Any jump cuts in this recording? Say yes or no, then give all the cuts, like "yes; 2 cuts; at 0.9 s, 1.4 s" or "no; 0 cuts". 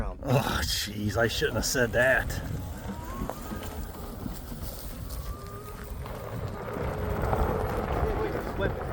no; 0 cuts